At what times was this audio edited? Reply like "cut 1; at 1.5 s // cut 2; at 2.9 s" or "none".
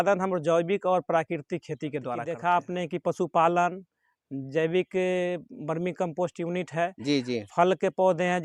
cut 1; at 2.3 s